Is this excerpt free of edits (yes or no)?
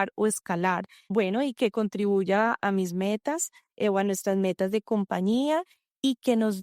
no